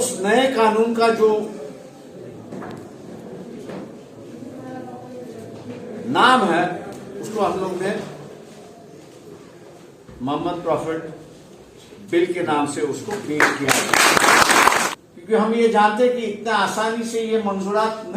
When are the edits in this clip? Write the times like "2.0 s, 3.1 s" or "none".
14.8 s

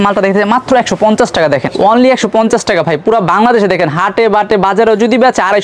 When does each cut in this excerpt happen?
none

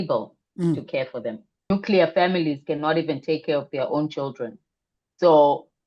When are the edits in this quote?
1.7 s

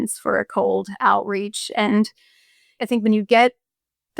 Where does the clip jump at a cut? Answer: 2.7 s

